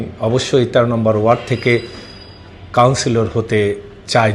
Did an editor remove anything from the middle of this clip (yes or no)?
no